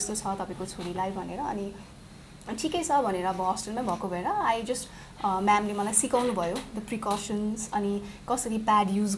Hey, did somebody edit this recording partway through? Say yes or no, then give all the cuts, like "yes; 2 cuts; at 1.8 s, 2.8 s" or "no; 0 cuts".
no; 0 cuts